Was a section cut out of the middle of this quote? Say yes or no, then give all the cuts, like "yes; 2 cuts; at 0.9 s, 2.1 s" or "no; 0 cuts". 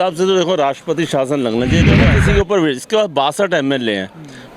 yes; 1 cut; at 2.0 s